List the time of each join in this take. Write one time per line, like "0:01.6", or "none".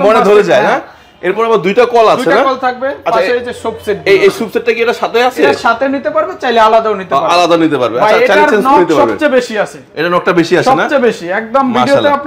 none